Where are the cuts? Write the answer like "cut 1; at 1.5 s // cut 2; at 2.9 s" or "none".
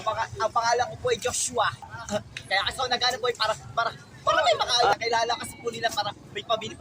cut 1; at 1.8 s // cut 2; at 4.9 s